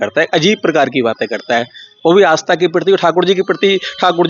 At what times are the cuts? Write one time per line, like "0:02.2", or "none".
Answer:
none

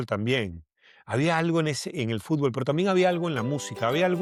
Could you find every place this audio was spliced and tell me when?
none

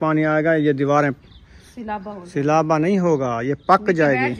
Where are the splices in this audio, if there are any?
none

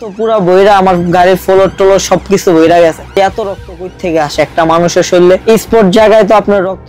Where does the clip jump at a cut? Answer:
0:03.2

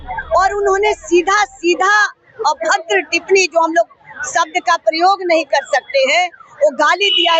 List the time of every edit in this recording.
none

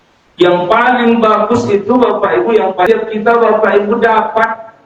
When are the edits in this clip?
0:02.9

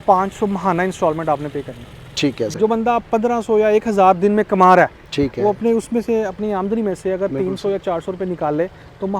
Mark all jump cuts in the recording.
0:02.5

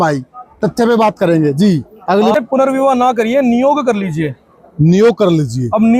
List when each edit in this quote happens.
0:02.3

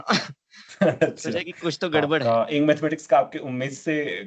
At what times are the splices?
0:02.2

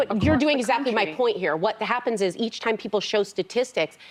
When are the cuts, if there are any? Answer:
none

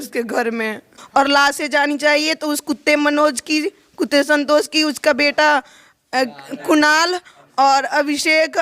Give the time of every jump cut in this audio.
0:01.0

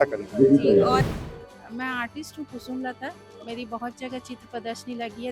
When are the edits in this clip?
0:01.1

